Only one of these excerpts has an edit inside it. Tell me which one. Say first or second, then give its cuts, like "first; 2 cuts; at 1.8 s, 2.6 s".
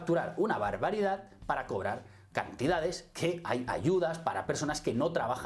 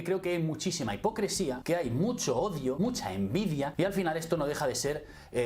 second; 3 cuts; at 1.6 s, 2.8 s, 3.7 s